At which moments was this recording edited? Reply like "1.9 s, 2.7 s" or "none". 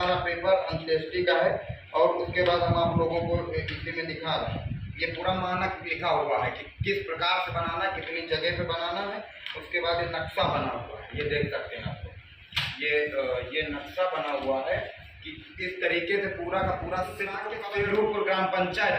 17.5 s